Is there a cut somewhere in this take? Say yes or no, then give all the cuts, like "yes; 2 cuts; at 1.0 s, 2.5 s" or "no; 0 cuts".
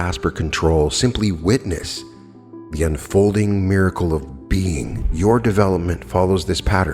yes; 1 cut; at 5.0 s